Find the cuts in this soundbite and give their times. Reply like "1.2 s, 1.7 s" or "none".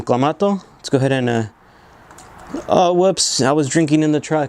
none